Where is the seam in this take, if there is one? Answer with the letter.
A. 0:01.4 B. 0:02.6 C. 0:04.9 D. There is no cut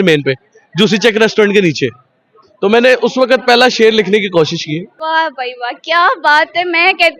C